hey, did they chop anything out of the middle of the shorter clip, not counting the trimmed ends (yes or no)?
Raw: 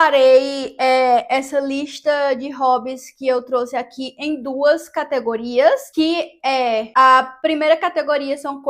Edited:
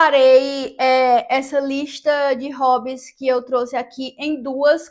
no